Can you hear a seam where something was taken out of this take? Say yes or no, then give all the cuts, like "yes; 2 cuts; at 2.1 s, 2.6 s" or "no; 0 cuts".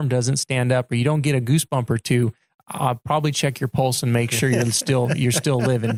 no; 0 cuts